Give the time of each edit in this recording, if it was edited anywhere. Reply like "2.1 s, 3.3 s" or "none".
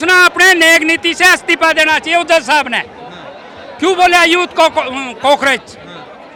none